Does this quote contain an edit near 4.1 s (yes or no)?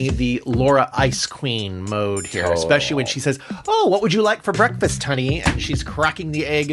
no